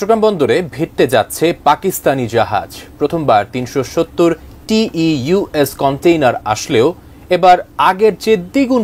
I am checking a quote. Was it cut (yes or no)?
no